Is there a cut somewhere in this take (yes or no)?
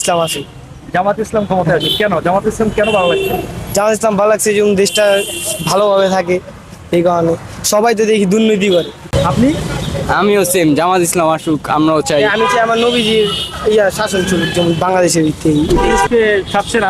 yes